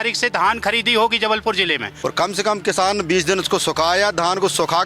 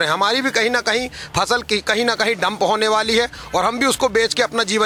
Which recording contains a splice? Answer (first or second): first